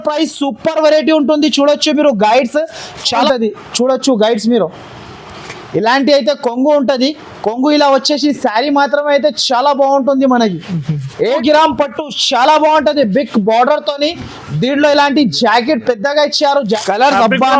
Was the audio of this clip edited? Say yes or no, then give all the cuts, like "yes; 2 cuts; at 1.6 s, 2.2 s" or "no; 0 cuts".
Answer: yes; 3 cuts; at 3.2 s, 11.0 s, 16.7 s